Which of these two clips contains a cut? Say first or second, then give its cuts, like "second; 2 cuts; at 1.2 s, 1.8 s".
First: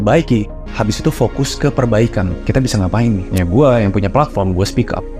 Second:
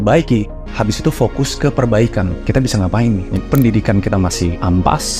second; 1 cut; at 3.4 s